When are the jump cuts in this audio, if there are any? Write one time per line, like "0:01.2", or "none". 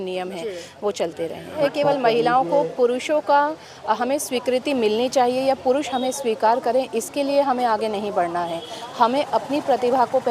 0:01.6